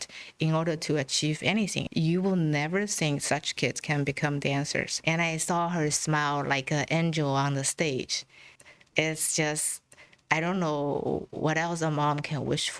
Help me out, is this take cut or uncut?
cut